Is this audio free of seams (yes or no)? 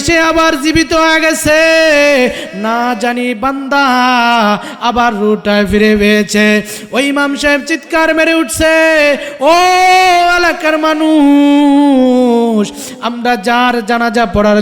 yes